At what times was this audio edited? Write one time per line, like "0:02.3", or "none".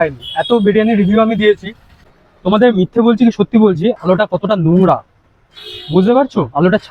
0:02.0

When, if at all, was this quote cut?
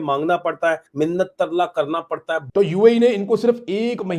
0:02.4

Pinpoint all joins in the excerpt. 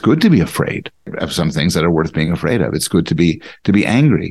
0:01.1

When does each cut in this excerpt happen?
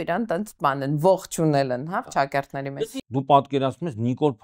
0:02.8

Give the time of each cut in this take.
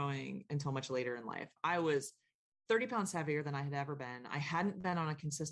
none

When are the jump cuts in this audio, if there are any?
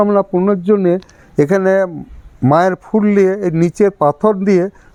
none

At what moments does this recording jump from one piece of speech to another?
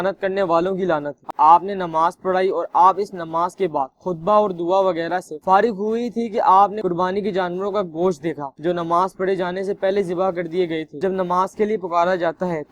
0:01.2
0:11.1

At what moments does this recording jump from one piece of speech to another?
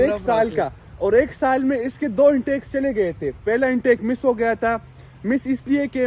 none

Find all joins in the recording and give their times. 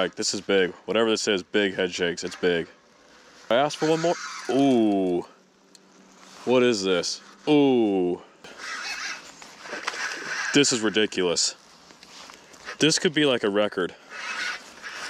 0:03.5
0:08.5

